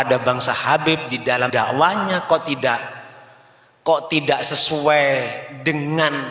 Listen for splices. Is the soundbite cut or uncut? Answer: cut